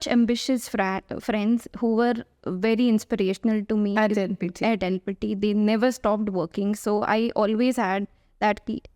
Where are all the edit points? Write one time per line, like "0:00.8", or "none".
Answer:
none